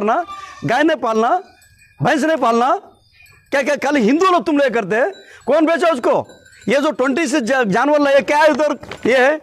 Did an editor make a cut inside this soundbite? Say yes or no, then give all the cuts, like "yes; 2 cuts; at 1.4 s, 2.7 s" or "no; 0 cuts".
no; 0 cuts